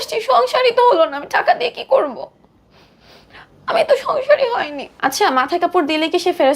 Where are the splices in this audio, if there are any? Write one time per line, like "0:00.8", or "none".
0:04.8